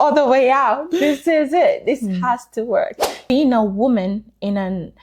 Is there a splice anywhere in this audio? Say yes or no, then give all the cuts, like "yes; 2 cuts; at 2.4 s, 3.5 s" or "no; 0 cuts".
yes; 1 cut; at 3.3 s